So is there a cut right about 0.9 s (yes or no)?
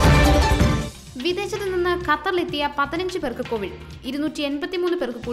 yes